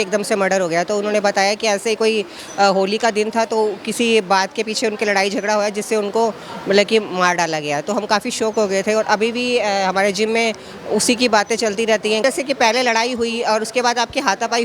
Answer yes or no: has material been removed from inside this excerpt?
yes